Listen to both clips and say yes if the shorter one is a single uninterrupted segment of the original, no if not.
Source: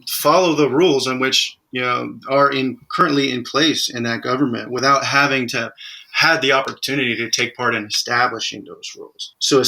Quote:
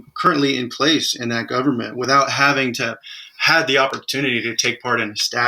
yes